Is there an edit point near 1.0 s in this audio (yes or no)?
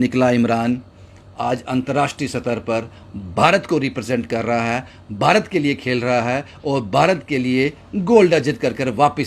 no